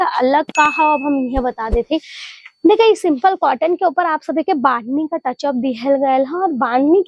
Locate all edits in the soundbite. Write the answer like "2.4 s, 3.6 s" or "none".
none